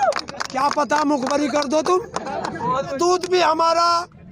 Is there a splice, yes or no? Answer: yes